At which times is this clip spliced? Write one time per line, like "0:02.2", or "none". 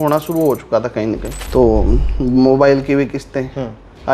0:01.4